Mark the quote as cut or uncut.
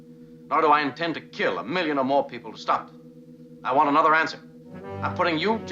cut